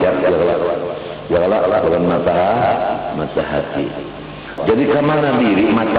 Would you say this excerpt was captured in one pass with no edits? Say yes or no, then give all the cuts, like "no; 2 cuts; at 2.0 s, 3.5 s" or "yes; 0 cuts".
no; 1 cut; at 4.6 s